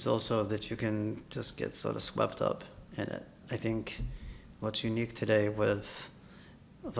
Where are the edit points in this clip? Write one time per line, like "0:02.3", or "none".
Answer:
0:03.4